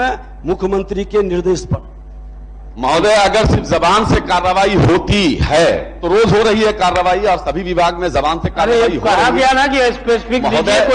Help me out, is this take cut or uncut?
uncut